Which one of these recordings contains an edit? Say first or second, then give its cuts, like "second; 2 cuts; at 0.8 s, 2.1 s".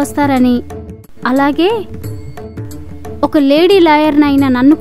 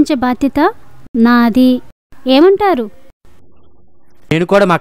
second; 1 cut; at 3.6 s